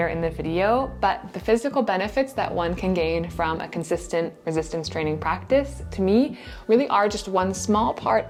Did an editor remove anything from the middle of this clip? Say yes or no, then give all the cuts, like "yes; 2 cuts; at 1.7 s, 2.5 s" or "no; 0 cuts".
no; 0 cuts